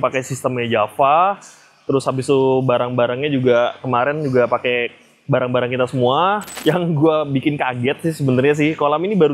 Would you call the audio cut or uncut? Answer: cut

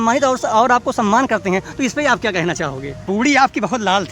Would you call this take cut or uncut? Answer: cut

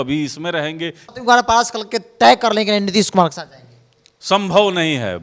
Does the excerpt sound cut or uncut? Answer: cut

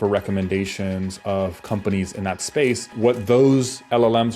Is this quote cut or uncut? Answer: cut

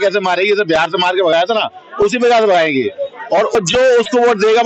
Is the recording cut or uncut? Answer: cut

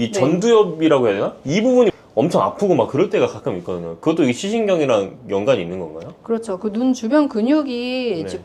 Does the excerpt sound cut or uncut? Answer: uncut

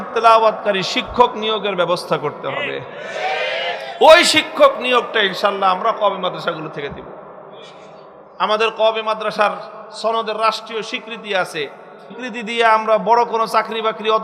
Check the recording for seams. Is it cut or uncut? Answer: uncut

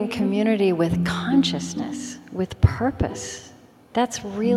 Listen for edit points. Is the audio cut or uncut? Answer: uncut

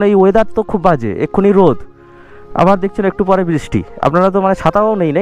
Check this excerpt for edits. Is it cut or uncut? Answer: uncut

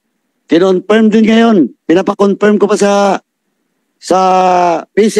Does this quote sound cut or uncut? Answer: uncut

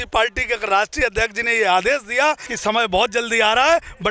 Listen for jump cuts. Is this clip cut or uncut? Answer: cut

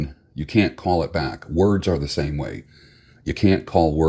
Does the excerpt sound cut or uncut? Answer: uncut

